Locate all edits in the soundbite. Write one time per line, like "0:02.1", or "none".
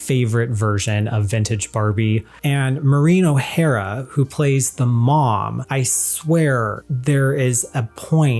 0:02.3
0:05.6
0:06.8